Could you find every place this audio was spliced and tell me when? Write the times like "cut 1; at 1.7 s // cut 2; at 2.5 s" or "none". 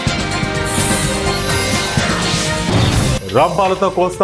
none

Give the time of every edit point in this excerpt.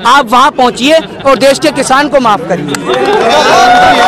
none

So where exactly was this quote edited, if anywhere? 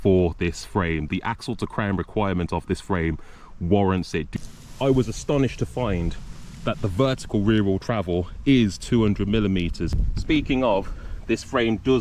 cut 1; at 4.3 s // cut 2; at 9.9 s

